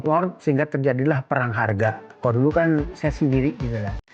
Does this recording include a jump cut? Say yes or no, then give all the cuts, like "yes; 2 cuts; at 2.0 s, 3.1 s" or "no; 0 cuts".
no; 0 cuts